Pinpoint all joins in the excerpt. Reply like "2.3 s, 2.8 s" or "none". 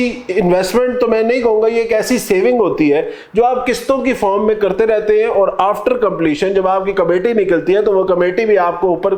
none